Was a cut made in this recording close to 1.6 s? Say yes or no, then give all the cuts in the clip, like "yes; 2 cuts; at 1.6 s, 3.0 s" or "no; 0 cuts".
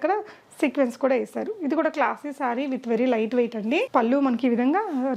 no; 0 cuts